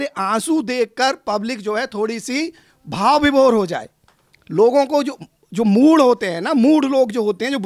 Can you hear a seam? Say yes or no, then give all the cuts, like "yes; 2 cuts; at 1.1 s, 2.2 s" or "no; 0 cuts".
no; 0 cuts